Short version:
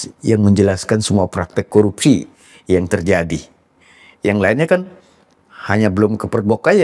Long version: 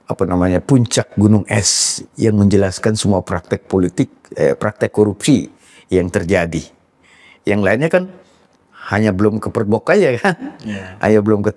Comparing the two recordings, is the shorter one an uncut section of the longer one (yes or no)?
no